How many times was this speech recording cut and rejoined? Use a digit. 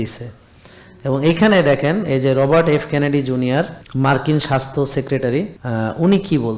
2